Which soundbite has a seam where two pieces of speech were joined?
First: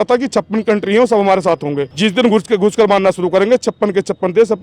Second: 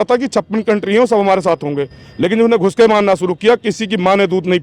first; 1 cut; at 1.8 s

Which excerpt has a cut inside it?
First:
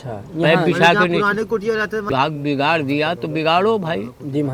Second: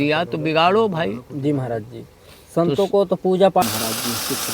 second; 1 cut; at 3.6 s

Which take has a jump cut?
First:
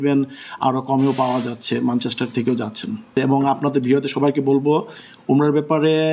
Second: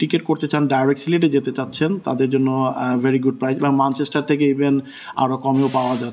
first; 1 cut; at 3.1 s

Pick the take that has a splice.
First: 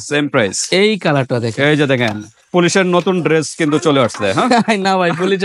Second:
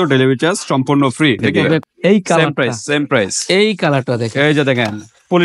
second; 1 cut; at 1.8 s

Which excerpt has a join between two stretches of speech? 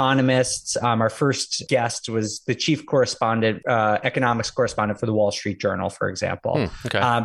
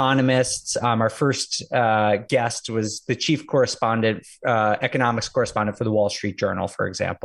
first; 2 cuts; at 1.6 s, 3.6 s

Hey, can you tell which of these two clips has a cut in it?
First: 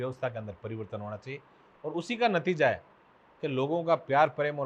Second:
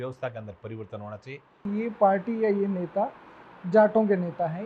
second; 1 cut; at 1.6 s

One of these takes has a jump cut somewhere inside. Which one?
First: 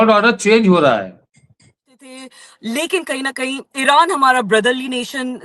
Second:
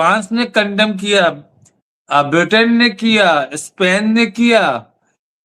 first; 1 cut; at 2.2 s

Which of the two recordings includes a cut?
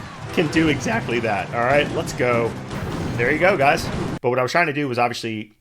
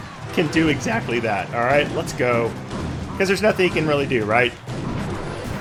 first; 2 cuts; at 2.7 s, 4.1 s

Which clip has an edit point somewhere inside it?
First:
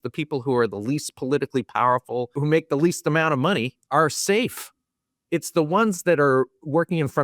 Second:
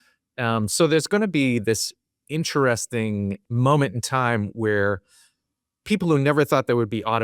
first; 2 cuts; at 2.4 s, 3.8 s

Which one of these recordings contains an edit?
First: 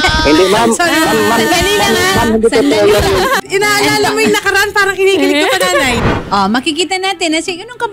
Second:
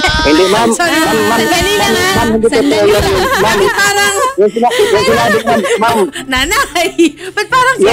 first; 2 cuts; at 3.3 s, 6.1 s

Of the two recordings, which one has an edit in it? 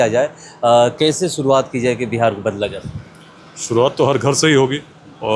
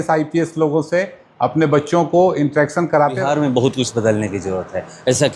second; 1 cut; at 3.2 s

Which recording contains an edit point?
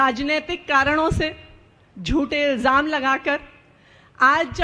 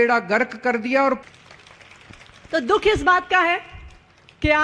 second; 1 cut; at 1.2 s

